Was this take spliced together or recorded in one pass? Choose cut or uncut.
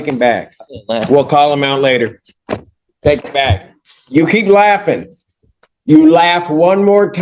uncut